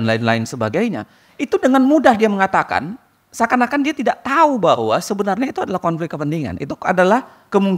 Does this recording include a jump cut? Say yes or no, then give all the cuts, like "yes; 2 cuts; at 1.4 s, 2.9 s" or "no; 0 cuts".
no; 0 cuts